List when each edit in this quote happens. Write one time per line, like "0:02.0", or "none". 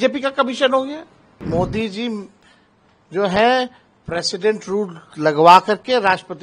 0:01.3